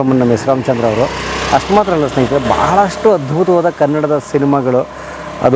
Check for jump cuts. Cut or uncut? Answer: uncut